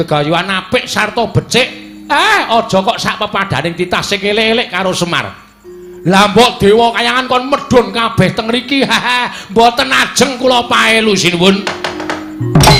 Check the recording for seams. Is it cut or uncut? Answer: uncut